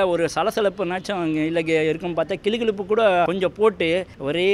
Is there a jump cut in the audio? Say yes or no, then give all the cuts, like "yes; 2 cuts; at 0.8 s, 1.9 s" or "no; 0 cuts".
no; 0 cuts